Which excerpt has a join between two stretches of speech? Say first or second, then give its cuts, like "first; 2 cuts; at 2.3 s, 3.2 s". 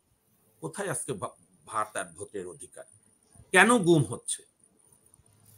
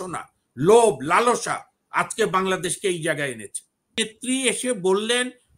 second; 1 cut; at 4.0 s